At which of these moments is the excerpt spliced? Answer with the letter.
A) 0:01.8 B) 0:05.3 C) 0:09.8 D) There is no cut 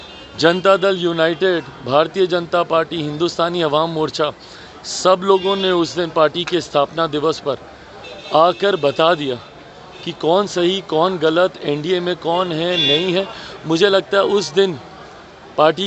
D